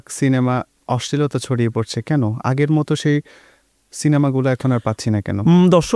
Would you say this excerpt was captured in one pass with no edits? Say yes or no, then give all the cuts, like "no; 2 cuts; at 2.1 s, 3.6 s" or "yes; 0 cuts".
yes; 0 cuts